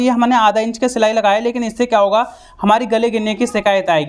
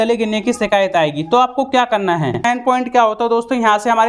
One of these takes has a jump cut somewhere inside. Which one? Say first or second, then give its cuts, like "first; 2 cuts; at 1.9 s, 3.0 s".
second; 1 cut; at 2.4 s